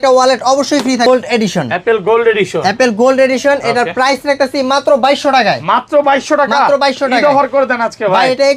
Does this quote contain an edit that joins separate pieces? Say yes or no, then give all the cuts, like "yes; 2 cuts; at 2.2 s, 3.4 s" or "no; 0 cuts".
yes; 1 cut; at 1.1 s